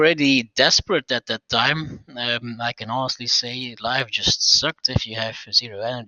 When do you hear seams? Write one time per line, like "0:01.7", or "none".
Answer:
none